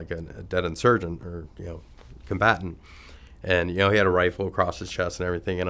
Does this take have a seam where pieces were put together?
no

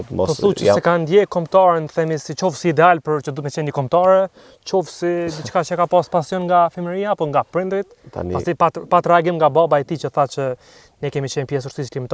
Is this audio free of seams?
yes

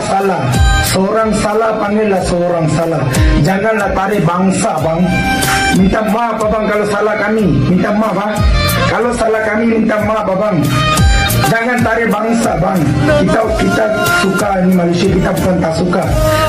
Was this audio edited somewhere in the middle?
no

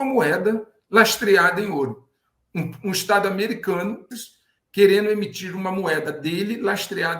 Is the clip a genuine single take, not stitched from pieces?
no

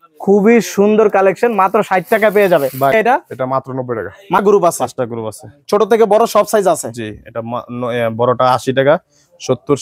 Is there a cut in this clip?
yes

